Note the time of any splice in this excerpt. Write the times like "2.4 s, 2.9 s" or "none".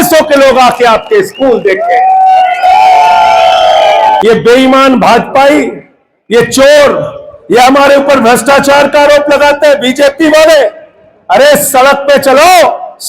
4.2 s